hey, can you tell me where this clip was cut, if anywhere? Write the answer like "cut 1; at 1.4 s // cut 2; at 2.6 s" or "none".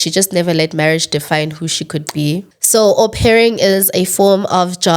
cut 1; at 2.5 s

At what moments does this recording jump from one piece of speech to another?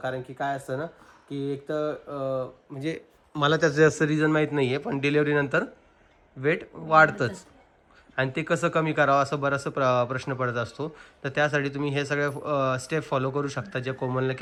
none

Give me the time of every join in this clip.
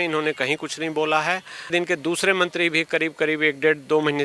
cut 1; at 1.7 s

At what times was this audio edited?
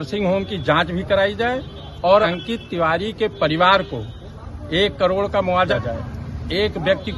cut 1; at 2.3 s // cut 2; at 5.7 s

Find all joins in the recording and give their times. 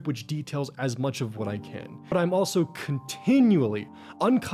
cut 1; at 1.9 s

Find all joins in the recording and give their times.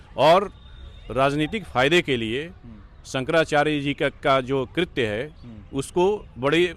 none

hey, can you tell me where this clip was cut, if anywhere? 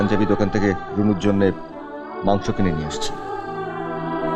none

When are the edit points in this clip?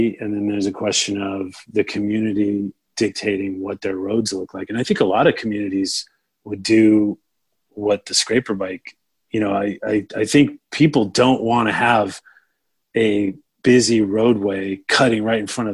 none

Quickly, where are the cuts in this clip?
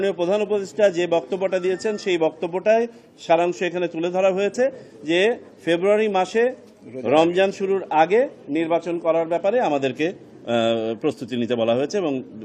none

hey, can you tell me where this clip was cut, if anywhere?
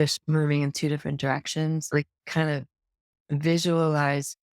cut 1; at 1.8 s

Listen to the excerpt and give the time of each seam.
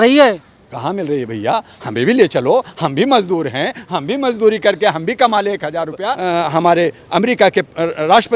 cut 1; at 6.1 s

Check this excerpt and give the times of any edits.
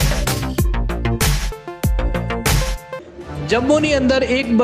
cut 1; at 2.8 s

